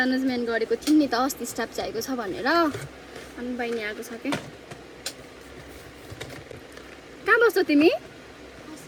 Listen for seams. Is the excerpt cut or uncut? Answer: uncut